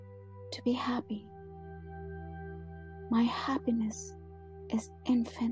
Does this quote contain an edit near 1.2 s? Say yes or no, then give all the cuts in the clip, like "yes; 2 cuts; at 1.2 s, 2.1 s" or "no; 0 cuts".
yes; 2 cuts; at 1.2 s, 3.0 s